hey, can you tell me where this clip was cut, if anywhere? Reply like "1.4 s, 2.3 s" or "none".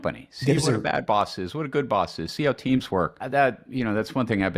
3.2 s

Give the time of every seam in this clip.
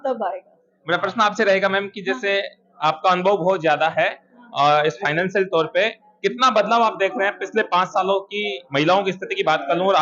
none

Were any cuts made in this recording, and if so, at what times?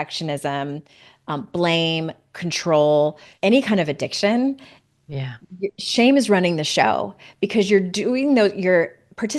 3.3 s

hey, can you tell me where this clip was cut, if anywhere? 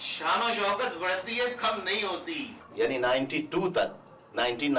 2.6 s

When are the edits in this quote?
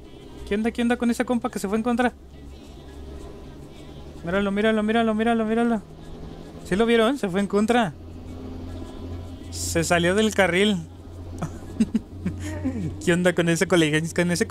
none

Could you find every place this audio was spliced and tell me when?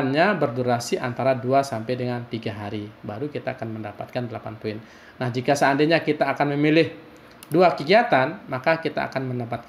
8.5 s

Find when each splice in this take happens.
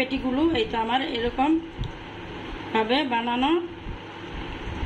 none

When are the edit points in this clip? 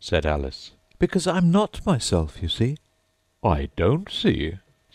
2.9 s

